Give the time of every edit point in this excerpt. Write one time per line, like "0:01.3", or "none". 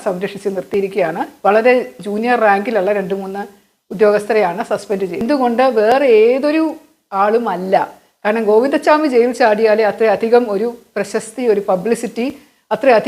0:05.2